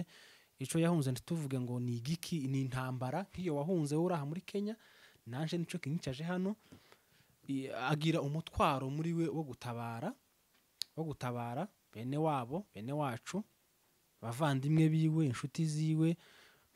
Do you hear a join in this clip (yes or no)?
no